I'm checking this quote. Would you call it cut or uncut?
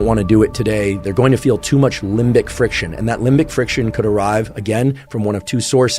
uncut